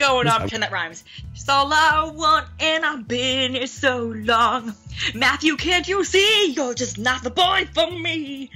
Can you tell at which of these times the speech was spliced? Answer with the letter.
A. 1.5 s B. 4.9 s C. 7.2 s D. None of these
D